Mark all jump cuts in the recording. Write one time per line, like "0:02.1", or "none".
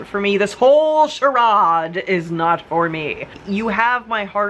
0:03.3